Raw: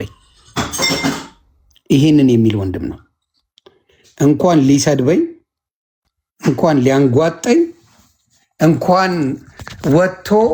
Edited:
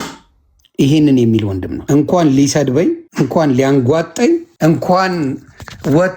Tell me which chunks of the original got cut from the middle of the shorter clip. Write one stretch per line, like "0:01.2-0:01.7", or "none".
0:02.8-0:04.0
0:05.4-0:06.3
0:07.8-0:08.5